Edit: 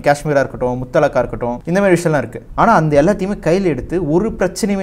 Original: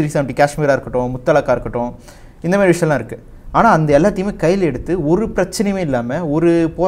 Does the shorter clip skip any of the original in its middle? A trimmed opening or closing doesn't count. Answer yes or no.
yes